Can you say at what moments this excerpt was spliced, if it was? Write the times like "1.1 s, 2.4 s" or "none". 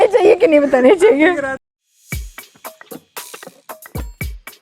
1.6 s